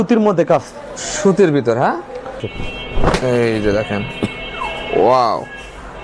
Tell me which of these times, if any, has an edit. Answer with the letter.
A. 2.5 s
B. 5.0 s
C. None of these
A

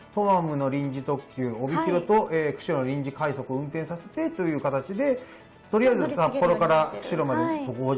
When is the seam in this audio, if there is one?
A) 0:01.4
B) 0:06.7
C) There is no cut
C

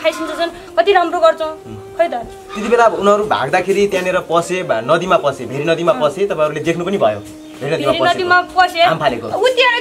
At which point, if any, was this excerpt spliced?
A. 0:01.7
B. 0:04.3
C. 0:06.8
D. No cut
D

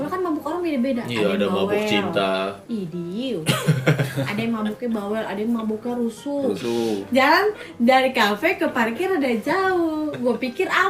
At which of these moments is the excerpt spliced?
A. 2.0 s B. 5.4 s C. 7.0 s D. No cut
C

